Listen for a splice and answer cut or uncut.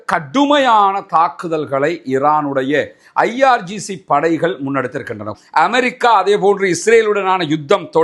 cut